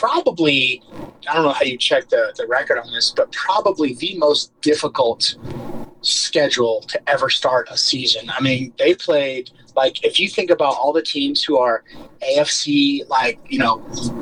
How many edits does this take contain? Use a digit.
1